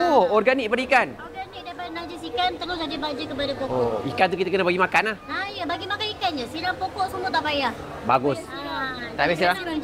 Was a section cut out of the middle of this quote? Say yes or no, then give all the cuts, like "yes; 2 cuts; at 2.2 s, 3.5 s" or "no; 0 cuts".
no; 0 cuts